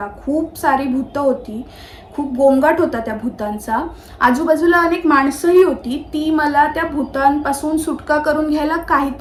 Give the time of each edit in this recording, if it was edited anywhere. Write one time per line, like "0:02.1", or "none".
none